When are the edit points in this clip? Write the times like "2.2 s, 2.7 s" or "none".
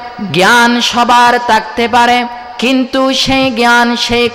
none